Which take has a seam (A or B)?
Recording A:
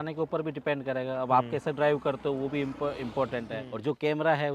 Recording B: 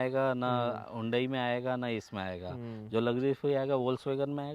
A